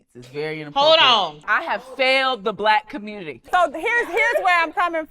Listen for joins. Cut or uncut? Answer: cut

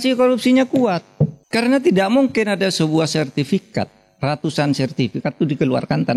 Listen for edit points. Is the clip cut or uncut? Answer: cut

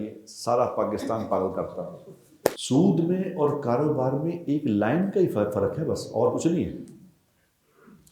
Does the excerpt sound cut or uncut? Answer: cut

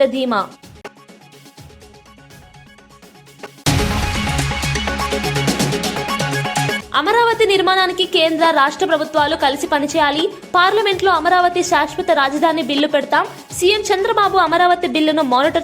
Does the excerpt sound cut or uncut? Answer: cut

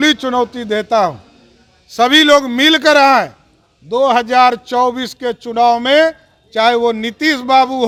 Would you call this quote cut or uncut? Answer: uncut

